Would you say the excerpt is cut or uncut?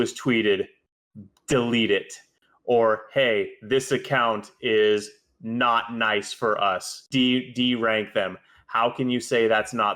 cut